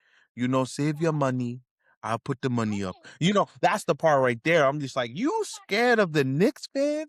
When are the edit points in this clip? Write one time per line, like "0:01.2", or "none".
none

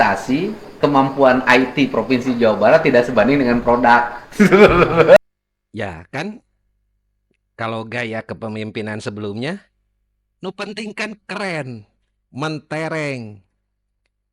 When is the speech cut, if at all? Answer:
0:05.2

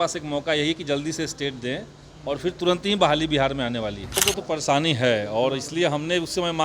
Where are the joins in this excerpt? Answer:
0:04.1

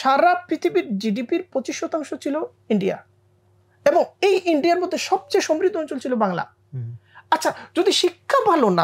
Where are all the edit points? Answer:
none

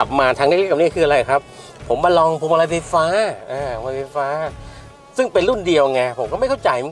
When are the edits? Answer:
none

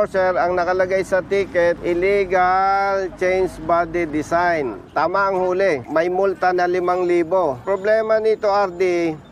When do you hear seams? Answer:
0:01.8
0:05.8
0:07.6

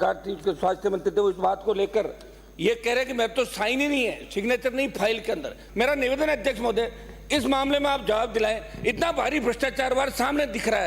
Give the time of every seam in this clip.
0:05.6

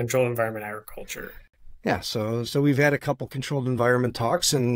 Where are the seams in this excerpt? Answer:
none

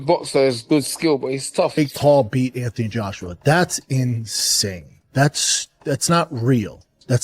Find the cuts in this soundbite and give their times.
0:01.7

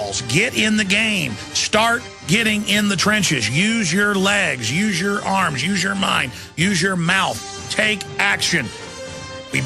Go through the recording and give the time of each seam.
0:02.0

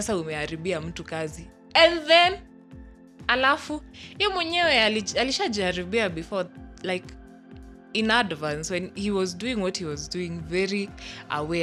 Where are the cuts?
none

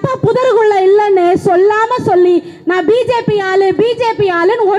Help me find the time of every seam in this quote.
none

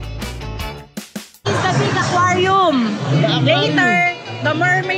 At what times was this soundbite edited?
0:01.4

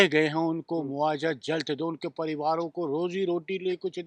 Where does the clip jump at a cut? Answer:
none

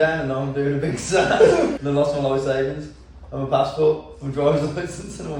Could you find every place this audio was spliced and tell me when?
0:01.8

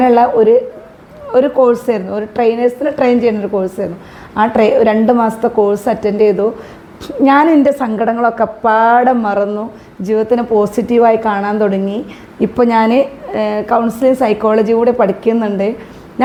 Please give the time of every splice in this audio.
none

